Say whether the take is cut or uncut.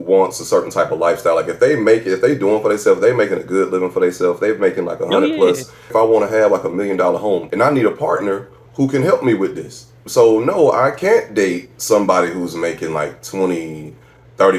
cut